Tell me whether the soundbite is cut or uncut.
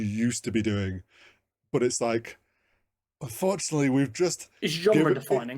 cut